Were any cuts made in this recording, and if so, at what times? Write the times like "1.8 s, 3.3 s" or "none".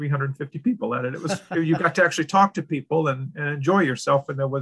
none